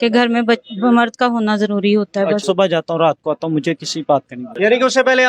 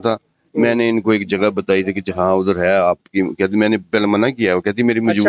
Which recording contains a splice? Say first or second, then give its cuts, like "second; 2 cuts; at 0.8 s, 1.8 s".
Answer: first; 2 cuts; at 2.4 s, 4.4 s